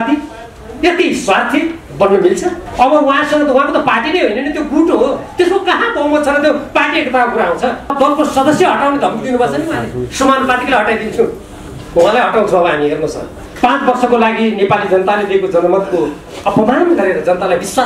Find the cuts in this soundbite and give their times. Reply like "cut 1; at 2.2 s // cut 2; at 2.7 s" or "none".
cut 1; at 2.6 s // cut 2; at 7.9 s // cut 3; at 13.5 s